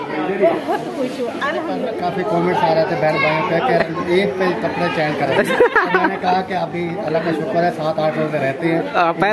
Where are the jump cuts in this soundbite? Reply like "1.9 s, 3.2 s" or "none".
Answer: 1.8 s